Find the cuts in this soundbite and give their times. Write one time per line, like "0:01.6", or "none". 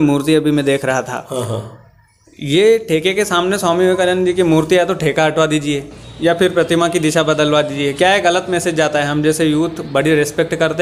none